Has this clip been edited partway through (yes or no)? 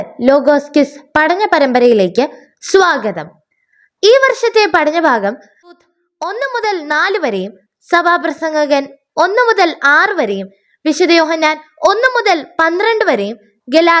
yes